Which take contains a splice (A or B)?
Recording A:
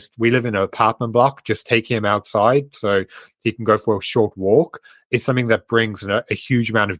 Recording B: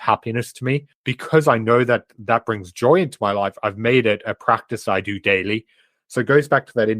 B